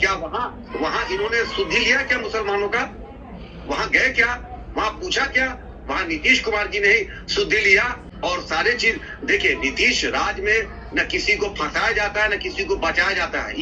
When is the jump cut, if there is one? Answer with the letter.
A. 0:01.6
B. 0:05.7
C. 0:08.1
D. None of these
D